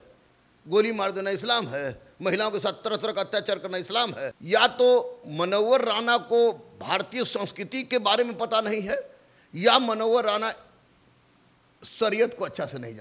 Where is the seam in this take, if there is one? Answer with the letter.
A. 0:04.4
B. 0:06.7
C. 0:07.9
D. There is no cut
A